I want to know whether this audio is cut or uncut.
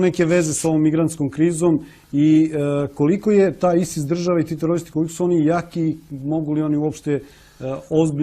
cut